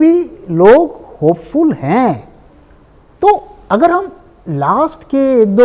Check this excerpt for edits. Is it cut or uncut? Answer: uncut